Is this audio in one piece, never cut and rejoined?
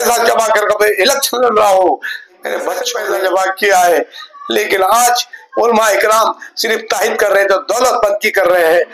no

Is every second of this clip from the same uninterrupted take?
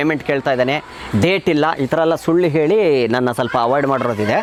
yes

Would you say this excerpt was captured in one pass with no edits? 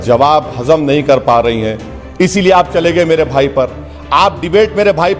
yes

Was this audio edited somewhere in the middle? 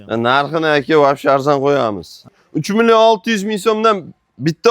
yes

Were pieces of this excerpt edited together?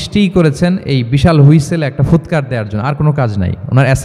no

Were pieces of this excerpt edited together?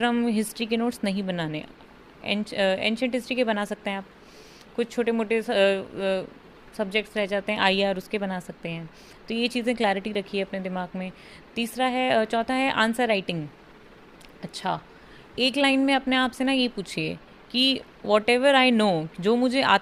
no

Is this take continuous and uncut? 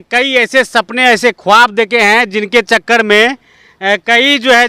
yes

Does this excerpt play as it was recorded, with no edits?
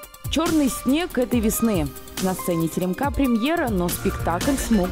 yes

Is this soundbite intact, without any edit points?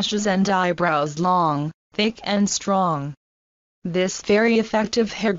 yes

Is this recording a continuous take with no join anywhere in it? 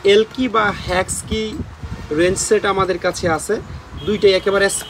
yes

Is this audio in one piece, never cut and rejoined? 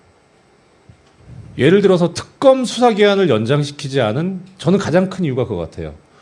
yes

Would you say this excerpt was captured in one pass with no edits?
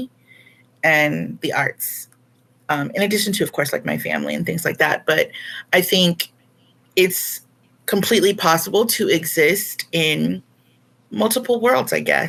yes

